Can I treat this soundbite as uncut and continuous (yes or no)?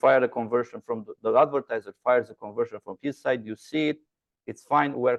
yes